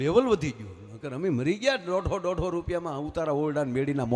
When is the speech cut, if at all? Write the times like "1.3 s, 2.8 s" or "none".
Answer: none

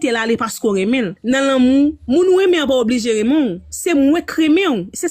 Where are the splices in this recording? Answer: 1.1 s

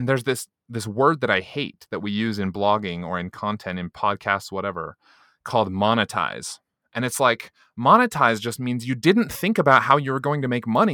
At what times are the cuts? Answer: none

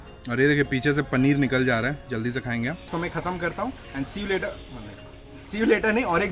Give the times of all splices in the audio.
2.8 s

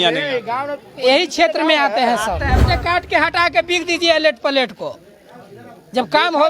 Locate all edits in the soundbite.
2.6 s

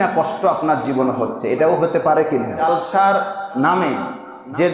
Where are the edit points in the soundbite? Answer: 2.6 s

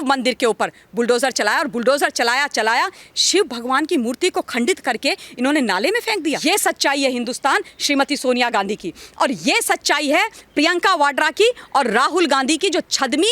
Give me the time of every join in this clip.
6.4 s

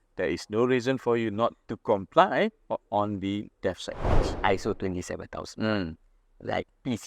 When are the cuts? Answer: 4.2 s

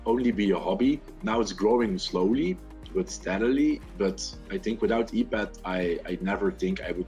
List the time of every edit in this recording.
1.2 s

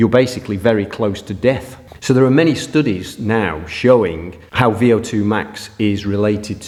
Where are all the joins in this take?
none

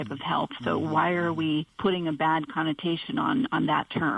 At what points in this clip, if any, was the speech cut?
1.7 s

